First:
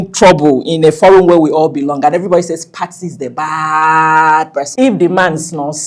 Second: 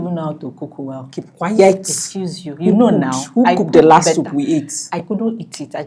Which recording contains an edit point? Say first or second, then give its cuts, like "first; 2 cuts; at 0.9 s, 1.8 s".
first; 1 cut; at 4.7 s